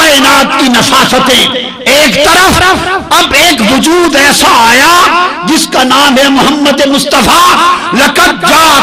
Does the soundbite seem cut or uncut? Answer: uncut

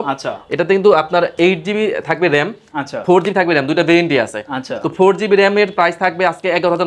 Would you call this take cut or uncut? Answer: uncut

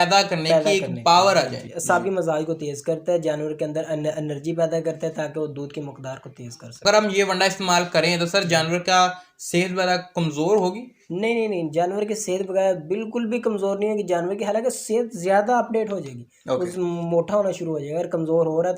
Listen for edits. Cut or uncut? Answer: cut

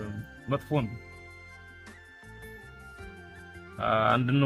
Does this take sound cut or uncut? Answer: uncut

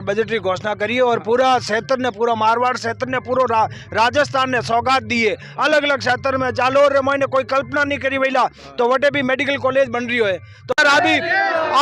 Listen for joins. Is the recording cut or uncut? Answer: cut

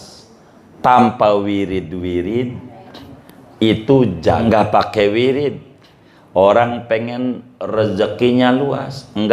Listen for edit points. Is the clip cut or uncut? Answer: cut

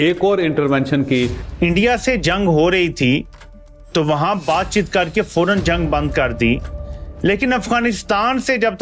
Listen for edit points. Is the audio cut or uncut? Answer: cut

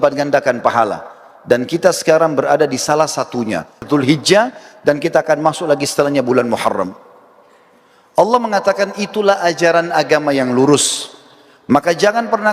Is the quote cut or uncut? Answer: cut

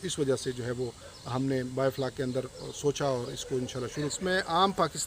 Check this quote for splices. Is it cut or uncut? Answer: cut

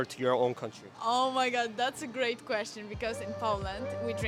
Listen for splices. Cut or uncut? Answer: uncut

